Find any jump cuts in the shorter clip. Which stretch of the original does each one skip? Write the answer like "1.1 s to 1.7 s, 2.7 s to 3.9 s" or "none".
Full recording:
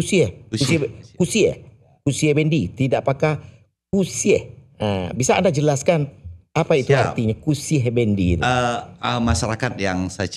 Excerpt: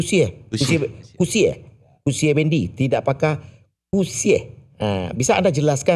none